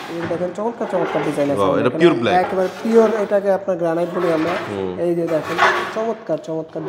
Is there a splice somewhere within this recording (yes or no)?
no